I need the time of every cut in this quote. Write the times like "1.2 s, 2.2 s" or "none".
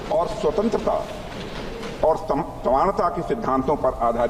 0.9 s